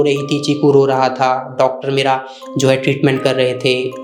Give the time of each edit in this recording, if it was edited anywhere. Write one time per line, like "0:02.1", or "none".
none